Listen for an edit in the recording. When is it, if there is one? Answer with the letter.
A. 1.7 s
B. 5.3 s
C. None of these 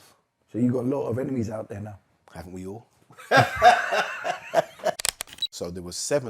B